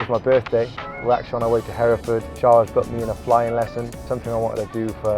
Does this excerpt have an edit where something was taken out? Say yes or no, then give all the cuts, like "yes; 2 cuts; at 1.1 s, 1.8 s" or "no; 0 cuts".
yes; 3 cuts; at 0.9 s, 2.3 s, 4.0 s